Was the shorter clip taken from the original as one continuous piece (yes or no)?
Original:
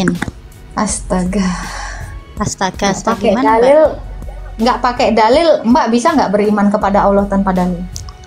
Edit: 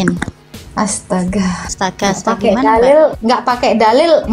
no